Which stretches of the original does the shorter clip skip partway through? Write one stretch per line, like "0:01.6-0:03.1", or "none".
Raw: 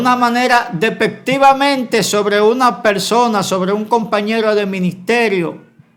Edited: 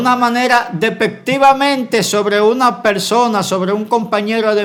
none